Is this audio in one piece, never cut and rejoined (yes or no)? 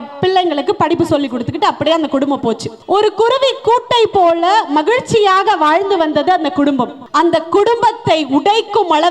no